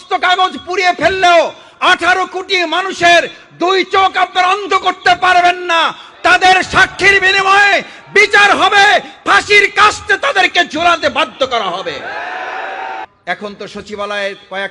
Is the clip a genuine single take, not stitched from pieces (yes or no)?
no